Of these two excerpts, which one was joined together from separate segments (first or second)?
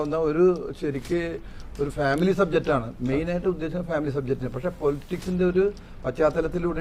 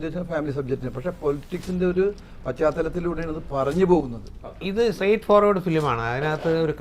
second